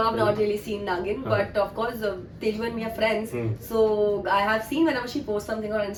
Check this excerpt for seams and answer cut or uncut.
uncut